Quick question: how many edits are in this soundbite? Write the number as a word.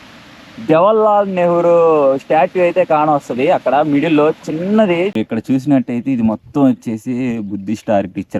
one